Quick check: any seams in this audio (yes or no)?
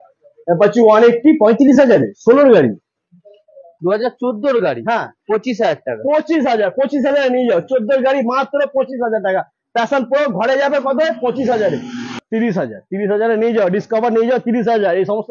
yes